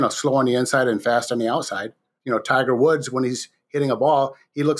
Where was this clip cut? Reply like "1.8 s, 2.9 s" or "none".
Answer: 2.1 s